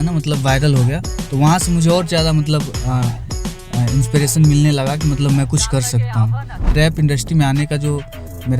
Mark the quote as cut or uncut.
cut